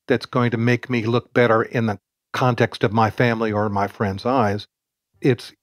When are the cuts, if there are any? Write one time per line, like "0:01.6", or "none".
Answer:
none